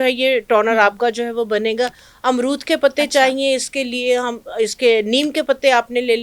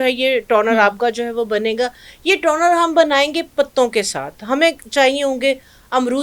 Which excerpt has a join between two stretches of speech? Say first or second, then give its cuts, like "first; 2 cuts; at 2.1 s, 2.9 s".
first; 1 cut; at 2.1 s